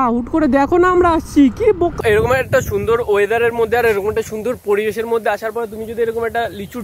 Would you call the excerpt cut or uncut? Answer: cut